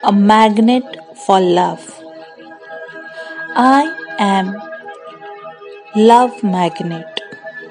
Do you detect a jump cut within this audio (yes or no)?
no